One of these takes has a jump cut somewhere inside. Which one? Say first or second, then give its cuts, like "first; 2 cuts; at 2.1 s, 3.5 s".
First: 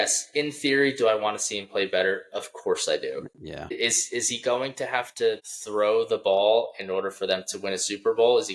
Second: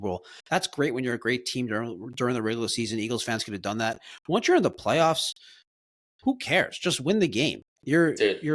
first; 2 cuts; at 3.8 s, 5.5 s